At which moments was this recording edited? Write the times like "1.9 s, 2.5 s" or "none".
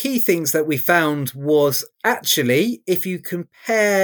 none